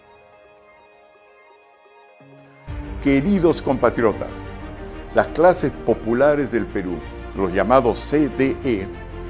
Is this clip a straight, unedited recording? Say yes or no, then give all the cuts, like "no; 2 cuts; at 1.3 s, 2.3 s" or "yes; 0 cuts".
no; 1 cut; at 2.7 s